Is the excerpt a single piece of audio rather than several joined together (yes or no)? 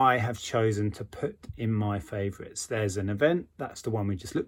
yes